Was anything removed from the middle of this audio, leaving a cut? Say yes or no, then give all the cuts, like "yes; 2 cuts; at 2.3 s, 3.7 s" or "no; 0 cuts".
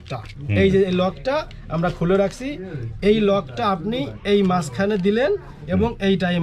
no; 0 cuts